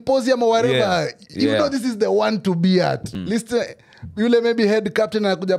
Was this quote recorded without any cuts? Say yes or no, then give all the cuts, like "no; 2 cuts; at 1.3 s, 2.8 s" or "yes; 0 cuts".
no; 1 cut; at 3.1 s